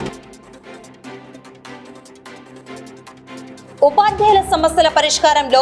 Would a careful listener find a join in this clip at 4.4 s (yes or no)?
no